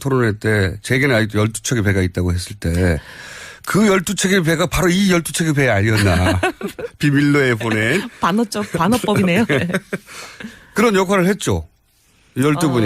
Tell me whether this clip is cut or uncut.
uncut